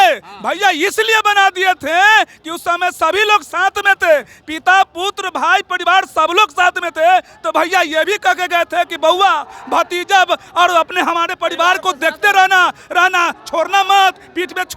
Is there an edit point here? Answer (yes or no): no